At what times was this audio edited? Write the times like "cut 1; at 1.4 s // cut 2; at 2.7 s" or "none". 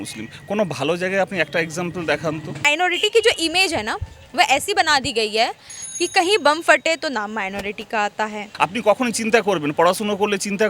cut 1; at 2.7 s // cut 2; at 8.4 s